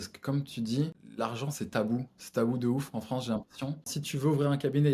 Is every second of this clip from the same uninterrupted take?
no; 2 cuts; at 1.0 s, 4.0 s

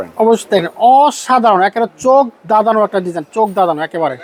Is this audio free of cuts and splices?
yes; 0 cuts

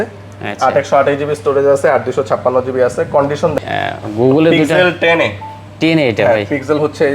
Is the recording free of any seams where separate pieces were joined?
no; 1 cut; at 3.6 s

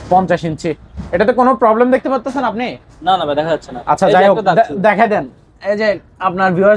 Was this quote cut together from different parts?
no; 0 cuts

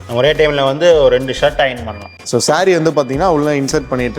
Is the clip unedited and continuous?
no; 1 cut; at 2.2 s

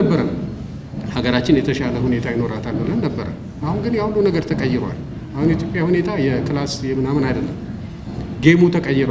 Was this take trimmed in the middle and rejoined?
no; 0 cuts

